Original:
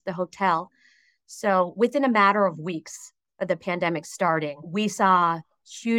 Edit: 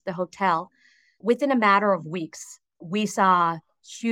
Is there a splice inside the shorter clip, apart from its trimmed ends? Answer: yes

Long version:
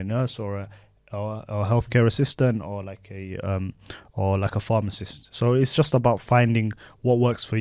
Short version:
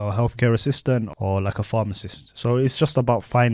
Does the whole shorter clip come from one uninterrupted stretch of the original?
no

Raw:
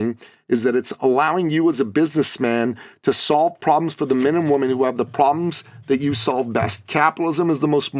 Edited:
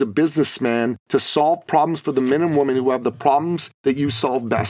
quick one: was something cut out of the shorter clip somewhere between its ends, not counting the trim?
yes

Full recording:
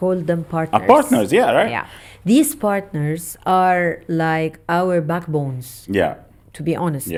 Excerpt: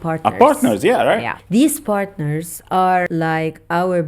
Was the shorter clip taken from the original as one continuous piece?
no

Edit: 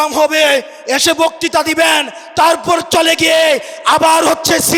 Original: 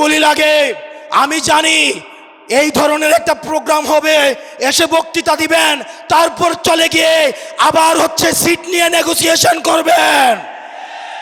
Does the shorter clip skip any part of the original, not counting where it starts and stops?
no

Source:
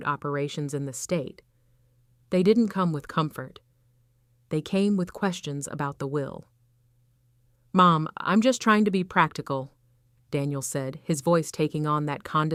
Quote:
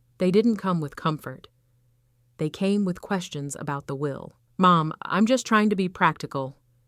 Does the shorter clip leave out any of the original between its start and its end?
yes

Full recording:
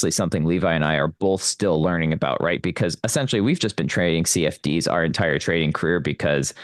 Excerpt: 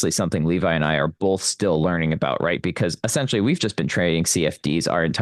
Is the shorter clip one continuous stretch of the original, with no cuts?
yes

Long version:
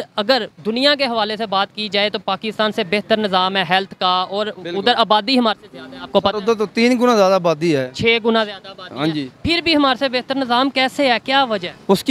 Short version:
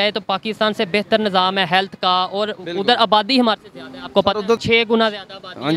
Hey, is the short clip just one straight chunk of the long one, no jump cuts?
no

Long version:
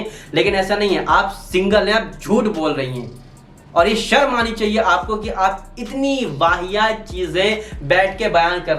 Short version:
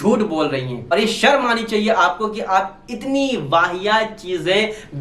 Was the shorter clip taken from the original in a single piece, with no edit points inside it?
no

